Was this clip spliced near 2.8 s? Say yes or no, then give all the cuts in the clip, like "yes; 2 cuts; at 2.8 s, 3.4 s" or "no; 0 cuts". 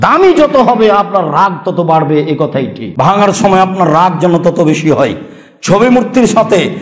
yes; 1 cut; at 2.8 s